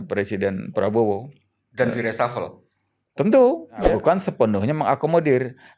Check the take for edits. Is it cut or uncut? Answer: cut